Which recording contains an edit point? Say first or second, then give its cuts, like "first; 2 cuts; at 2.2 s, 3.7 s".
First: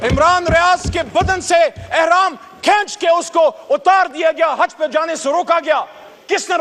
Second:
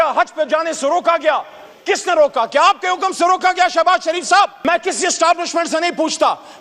second; 1 cut; at 4.6 s